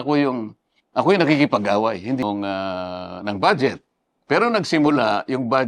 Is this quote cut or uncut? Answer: cut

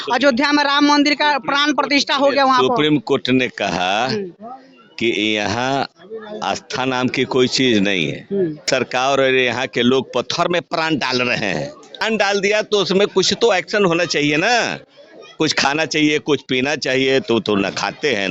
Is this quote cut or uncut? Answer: cut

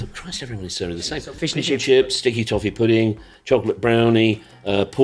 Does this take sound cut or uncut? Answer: cut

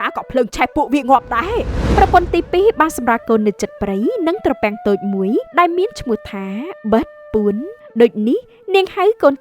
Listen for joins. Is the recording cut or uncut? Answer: cut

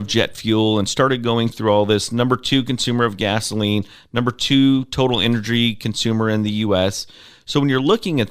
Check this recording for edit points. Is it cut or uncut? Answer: uncut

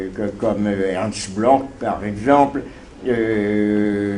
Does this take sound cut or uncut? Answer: cut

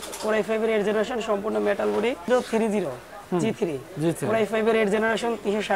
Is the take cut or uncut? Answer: cut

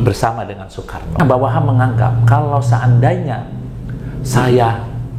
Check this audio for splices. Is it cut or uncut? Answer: cut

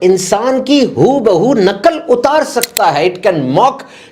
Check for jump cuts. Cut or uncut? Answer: uncut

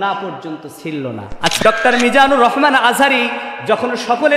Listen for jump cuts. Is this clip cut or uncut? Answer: cut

